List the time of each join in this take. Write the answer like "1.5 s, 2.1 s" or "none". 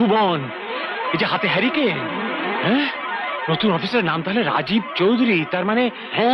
none